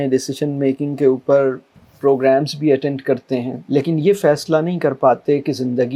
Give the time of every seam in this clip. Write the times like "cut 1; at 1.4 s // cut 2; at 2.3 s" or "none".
cut 1; at 3.6 s